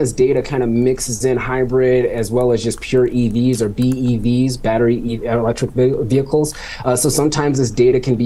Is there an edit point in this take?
no; 0 cuts

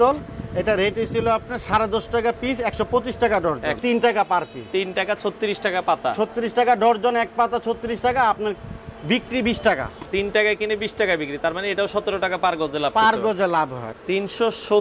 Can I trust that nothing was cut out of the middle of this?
no; 3 cuts; at 3.8 s, 10.0 s, 13.9 s

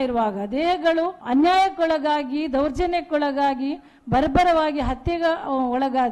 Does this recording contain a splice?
yes; 1 cut; at 1.2 s

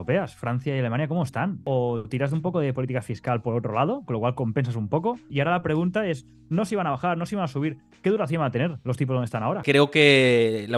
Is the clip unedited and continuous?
no; 3 cuts; at 1.6 s, 5.3 s, 9.6 s

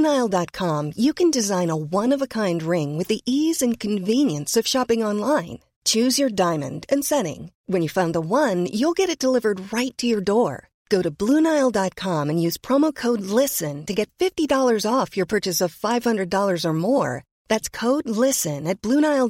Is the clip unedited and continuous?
yes; 0 cuts

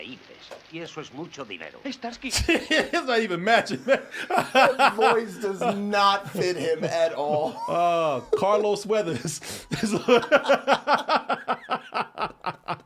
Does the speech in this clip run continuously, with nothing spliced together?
yes; 0 cuts

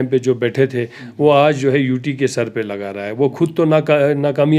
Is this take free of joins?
yes; 0 cuts

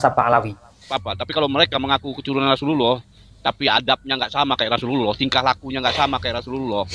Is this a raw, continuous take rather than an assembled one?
no; 1 cut; at 0.9 s

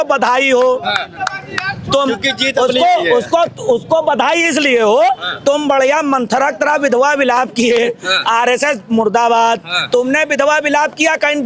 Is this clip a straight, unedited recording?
yes; 0 cuts

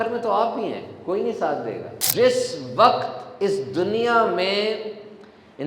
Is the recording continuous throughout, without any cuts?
no; 1 cut; at 2.0 s

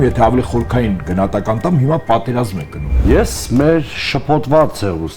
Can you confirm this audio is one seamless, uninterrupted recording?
no; 1 cut; at 3.0 s

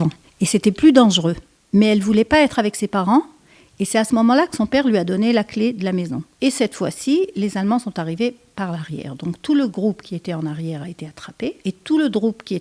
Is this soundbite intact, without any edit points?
no; 3 cuts; at 0.8 s, 6.2 s, 11.6 s

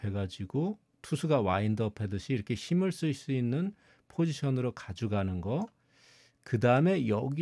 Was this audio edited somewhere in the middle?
no; 0 cuts

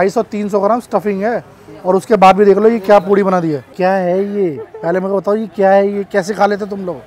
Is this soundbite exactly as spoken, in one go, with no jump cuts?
no; 1 cut; at 3.7 s

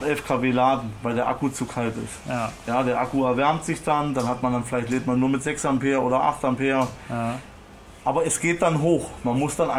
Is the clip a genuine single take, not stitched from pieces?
yes; 0 cuts

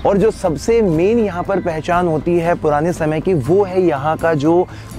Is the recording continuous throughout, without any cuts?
yes; 0 cuts

